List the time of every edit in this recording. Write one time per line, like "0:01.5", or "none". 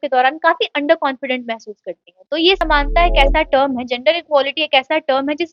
0:02.6